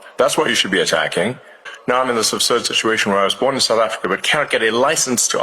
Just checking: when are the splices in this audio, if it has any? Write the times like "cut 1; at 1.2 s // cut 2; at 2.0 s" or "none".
cut 1; at 1.7 s